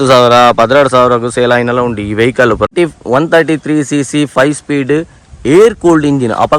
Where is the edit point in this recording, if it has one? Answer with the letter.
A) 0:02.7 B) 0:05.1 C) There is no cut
A